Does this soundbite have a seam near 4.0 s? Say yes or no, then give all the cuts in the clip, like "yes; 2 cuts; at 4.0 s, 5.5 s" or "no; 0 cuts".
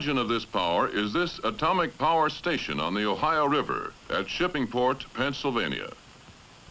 yes; 1 cut; at 4.0 s